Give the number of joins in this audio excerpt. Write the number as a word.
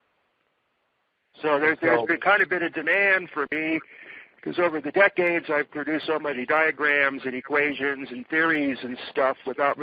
zero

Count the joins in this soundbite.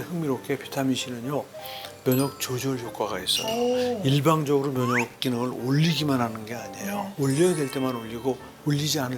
zero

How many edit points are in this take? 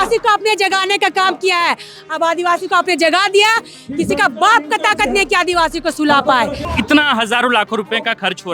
one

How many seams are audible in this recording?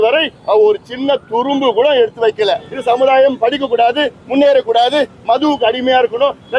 one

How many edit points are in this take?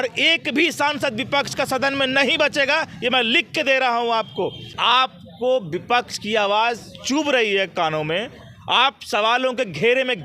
one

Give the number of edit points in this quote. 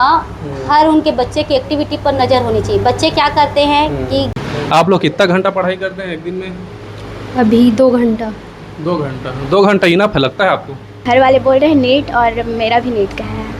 two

